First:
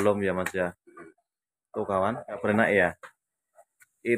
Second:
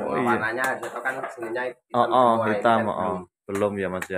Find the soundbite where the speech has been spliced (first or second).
first